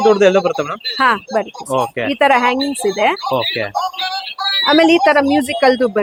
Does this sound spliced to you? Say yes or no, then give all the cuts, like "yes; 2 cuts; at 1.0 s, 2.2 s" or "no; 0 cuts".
no; 0 cuts